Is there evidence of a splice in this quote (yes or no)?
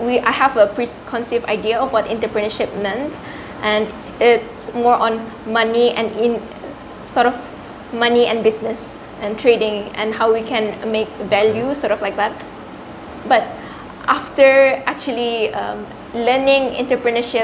no